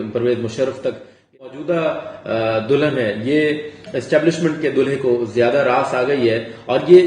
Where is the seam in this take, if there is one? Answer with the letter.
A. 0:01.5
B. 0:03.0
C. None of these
A